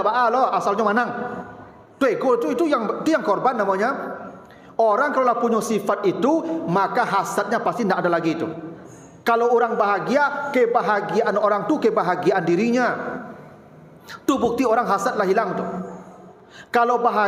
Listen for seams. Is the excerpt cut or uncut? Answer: uncut